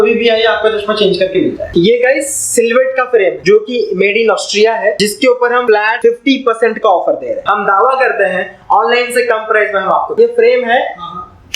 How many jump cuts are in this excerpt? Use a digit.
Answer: 5